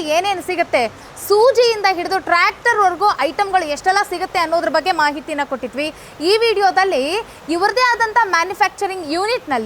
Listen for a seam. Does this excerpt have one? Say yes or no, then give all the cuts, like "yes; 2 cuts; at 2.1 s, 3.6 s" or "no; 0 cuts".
no; 0 cuts